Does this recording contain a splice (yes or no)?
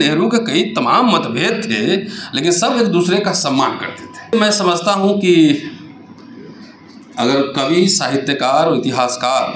yes